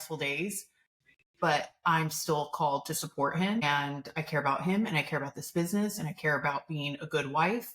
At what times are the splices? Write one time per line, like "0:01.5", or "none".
0:03.6